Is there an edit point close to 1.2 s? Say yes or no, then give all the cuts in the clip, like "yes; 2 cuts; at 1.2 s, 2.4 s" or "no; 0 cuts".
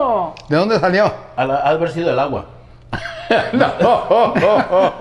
yes; 1 cut; at 1.2 s